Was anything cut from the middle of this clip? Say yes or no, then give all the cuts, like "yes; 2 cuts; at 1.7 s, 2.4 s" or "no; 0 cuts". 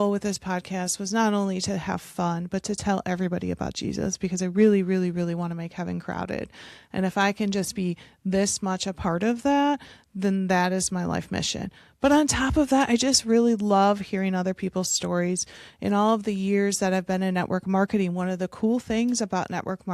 no; 0 cuts